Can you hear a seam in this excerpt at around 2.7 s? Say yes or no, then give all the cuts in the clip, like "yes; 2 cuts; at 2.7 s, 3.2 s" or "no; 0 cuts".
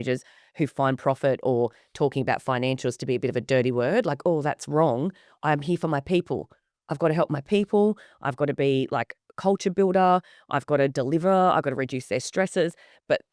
no; 0 cuts